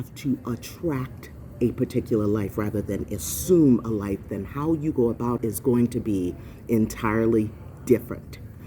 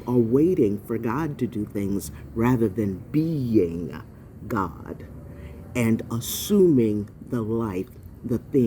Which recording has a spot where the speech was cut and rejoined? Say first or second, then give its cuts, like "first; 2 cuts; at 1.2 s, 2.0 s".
first; 1 cut; at 5.4 s